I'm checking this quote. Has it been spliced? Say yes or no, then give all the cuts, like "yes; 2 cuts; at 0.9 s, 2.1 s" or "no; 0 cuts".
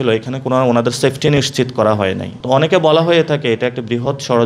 yes; 1 cut; at 2.3 s